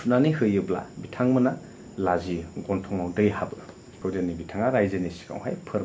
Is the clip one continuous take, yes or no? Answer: no